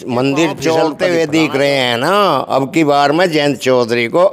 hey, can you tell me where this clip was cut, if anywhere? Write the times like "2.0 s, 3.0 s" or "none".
1.0 s